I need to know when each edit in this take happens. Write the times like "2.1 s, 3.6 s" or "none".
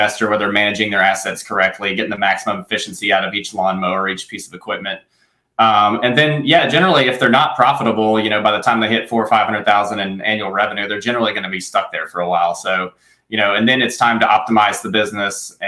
none